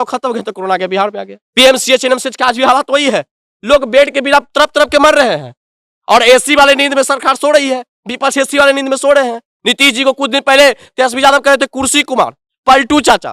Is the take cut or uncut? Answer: cut